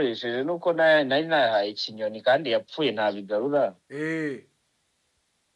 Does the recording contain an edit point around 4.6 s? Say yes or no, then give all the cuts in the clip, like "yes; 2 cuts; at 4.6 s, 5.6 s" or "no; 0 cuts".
no; 0 cuts